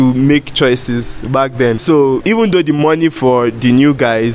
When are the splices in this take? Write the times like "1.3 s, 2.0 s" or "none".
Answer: 2.2 s